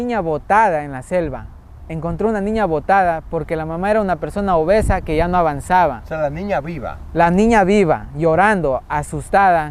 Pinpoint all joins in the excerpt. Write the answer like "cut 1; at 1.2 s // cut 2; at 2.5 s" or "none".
none